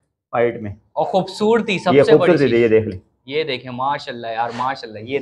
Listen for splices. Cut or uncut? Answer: uncut